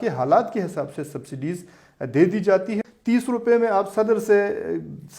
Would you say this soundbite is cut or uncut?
cut